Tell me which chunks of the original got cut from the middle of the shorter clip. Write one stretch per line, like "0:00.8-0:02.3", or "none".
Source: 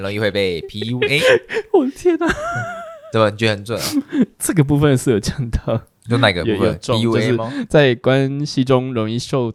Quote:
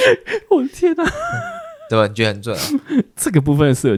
none